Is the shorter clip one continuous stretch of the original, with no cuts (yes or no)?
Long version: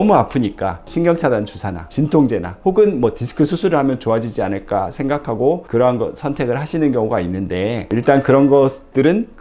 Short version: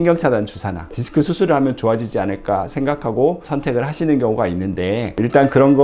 no